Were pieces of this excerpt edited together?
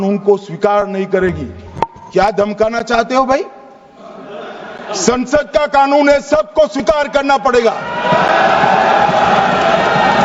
no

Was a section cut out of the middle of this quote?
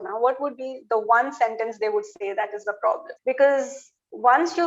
yes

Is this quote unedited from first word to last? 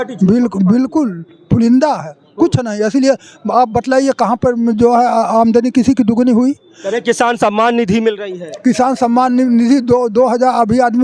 yes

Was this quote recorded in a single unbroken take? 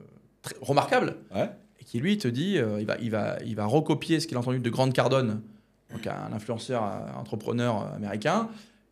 yes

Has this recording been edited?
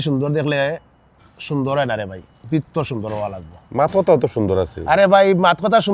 no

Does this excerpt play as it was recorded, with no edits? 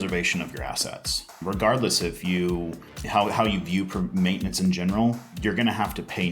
no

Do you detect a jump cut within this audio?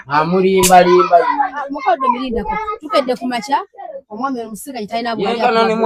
no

